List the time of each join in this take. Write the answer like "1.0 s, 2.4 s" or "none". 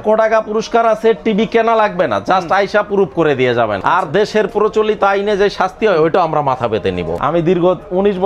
3.8 s, 7.2 s